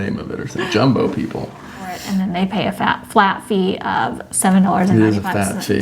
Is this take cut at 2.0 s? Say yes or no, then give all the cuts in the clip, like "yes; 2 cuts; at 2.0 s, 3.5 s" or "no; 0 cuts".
yes; 1 cut; at 2.0 s